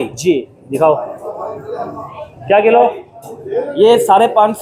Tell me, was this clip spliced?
no; 0 cuts

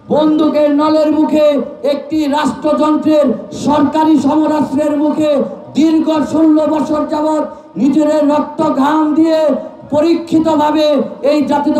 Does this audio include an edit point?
no; 0 cuts

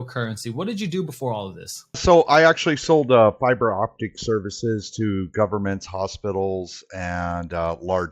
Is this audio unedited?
no; 1 cut; at 2.0 s

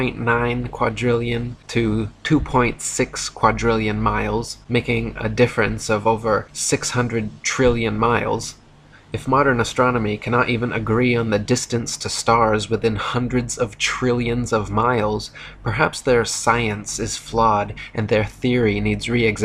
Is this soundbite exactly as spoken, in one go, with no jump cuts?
yes; 0 cuts

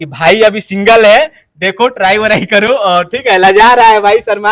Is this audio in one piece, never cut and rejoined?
yes; 0 cuts

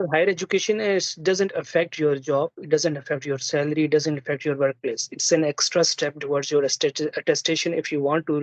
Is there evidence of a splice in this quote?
no; 0 cuts

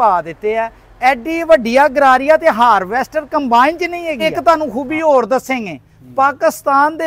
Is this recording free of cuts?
no; 1 cut; at 4.2 s

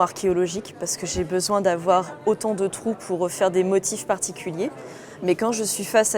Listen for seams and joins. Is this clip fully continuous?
yes; 0 cuts

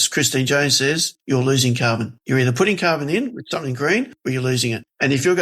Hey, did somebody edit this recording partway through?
yes; 3 cuts; at 1.1 s, 2.1 s, 4.3 s

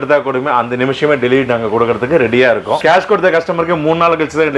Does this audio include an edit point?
yes; 1 cut; at 2.8 s

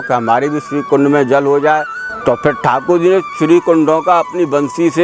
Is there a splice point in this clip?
yes; 1 cut; at 2.0 s

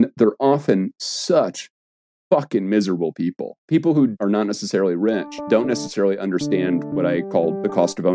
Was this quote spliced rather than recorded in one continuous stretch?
yes; 4 cuts; at 3.5 s, 4.1 s, 5.4 s, 7.3 s

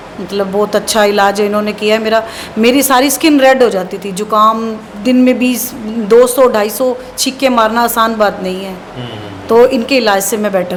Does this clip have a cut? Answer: no; 0 cuts

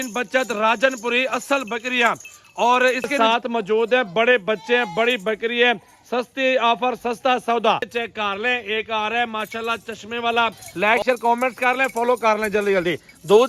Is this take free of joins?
no; 3 cuts; at 3.1 s, 7.9 s, 10.6 s

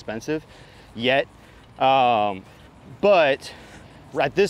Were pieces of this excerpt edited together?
no; 0 cuts

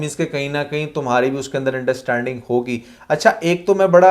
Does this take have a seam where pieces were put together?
no; 0 cuts

